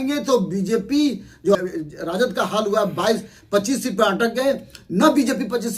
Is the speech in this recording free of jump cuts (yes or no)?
no